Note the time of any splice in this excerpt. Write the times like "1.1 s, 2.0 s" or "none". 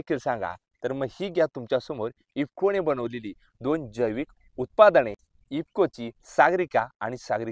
none